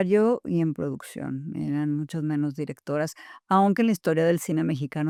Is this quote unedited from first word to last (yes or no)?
yes